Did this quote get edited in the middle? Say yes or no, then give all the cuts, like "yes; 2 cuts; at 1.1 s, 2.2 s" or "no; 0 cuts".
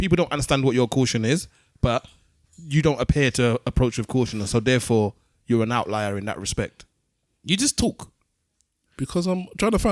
no; 0 cuts